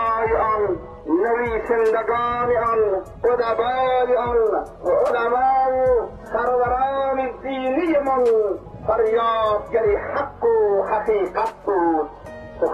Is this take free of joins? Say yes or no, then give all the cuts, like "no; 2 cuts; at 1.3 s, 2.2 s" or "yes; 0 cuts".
no; 5 cuts; at 0.9 s, 3.1 s, 4.7 s, 6.2 s, 8.7 s